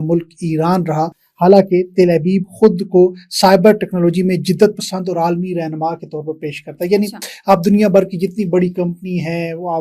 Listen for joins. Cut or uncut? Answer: uncut